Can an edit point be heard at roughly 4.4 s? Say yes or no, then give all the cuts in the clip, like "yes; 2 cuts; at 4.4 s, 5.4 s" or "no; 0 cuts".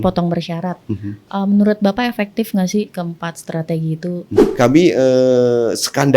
yes; 1 cut; at 4.4 s